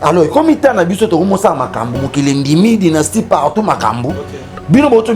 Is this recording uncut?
yes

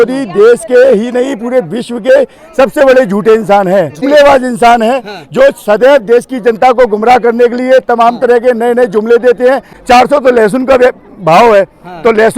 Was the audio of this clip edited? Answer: yes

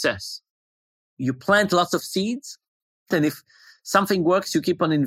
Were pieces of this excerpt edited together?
yes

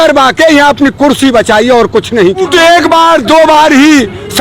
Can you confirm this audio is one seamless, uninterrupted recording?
no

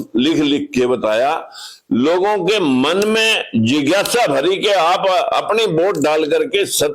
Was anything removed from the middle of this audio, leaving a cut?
no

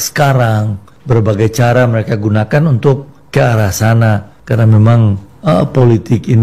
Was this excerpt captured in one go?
no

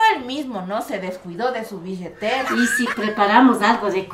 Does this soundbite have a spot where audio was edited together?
no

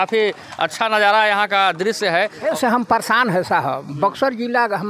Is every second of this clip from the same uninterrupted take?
no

